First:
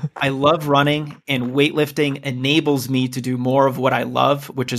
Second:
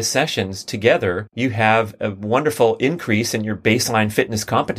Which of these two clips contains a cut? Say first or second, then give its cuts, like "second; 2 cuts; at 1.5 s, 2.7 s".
second; 1 cut; at 1.3 s